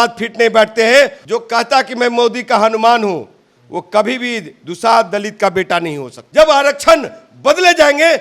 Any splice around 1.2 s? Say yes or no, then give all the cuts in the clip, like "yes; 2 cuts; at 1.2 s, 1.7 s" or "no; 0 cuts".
yes; 2 cuts; at 1.2 s, 6.1 s